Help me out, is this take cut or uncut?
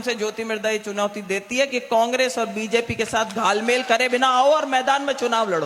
uncut